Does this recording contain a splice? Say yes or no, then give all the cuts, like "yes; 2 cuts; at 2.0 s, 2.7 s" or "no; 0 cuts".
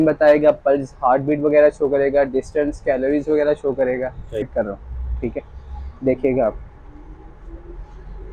yes; 1 cut; at 4.5 s